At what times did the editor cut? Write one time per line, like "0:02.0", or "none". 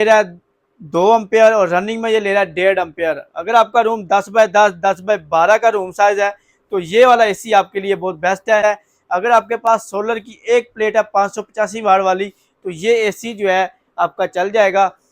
0:08.6